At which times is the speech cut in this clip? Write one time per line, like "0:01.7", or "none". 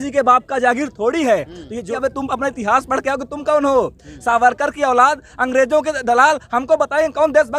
0:01.9